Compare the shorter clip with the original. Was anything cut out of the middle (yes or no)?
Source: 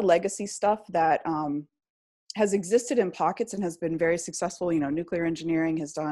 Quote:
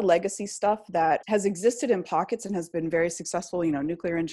yes